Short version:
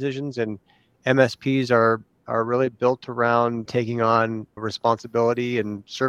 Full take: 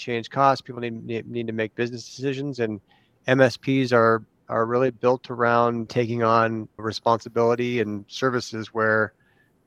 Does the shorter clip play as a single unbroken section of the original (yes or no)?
yes